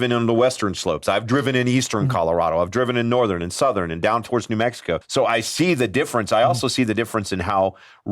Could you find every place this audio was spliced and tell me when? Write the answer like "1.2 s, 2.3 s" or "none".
5.0 s